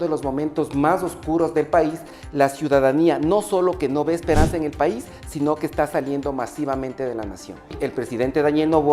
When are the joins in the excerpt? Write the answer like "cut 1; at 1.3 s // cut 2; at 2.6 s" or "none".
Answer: cut 1; at 2.1 s // cut 2; at 7.8 s